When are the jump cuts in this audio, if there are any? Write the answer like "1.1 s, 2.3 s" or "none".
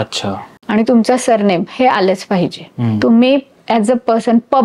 2.7 s